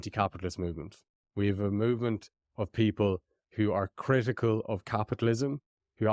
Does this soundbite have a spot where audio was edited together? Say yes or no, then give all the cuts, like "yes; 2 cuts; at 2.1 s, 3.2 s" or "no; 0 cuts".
no; 0 cuts